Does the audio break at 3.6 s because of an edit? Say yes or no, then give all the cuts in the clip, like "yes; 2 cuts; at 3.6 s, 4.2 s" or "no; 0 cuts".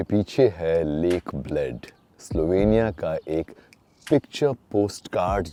no; 0 cuts